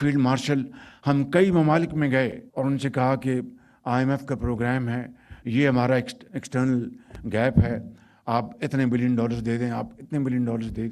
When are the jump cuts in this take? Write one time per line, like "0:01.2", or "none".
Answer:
0:02.4